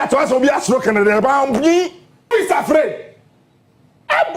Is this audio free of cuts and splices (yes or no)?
no